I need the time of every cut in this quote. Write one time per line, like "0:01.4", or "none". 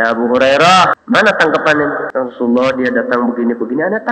0:00.9
0:02.0